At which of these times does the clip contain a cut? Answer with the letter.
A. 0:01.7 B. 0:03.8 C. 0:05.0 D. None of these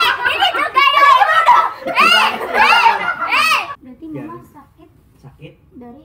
B